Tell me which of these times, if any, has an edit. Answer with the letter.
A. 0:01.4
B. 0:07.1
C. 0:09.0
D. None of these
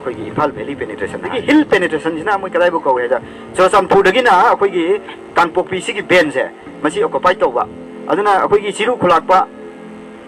A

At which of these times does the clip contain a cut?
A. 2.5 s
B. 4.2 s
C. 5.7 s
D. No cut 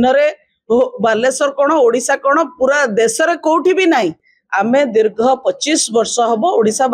B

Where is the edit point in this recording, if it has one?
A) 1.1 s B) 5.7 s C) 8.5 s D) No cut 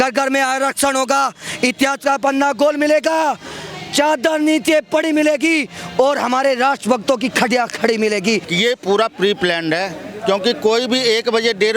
C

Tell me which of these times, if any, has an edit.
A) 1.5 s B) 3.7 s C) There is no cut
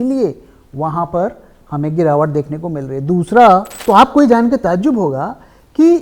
B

